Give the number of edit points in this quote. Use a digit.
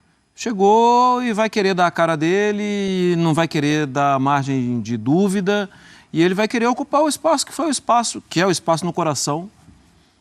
0